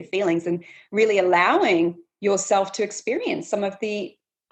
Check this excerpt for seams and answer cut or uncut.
uncut